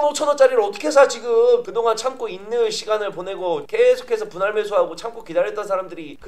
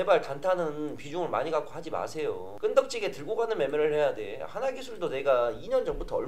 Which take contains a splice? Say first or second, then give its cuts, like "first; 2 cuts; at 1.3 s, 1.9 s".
first; 1 cut; at 1.6 s